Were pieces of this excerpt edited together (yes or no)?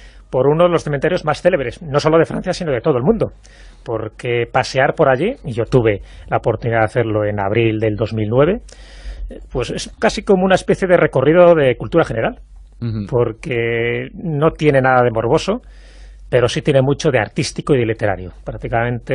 no